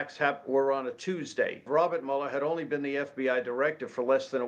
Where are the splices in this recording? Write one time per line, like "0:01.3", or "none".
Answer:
0:01.6